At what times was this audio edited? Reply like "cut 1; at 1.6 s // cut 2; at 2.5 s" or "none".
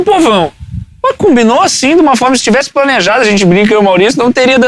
none